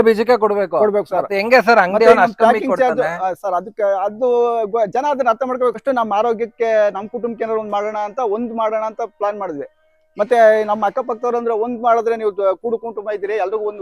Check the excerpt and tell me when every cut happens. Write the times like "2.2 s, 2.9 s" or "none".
5.8 s